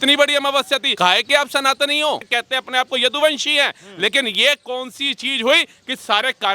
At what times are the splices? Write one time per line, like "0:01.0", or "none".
0:00.9
0:02.3